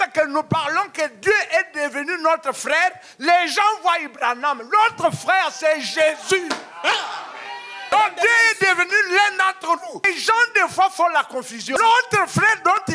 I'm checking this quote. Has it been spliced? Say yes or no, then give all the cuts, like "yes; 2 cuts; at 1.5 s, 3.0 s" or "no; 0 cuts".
yes; 3 cuts; at 7.9 s, 10.1 s, 11.6 s